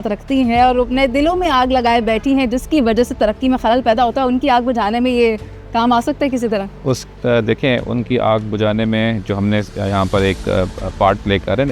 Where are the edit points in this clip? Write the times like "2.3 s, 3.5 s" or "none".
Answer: none